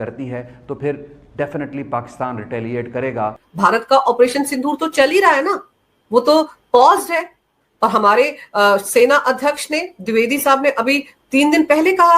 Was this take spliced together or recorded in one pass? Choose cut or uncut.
cut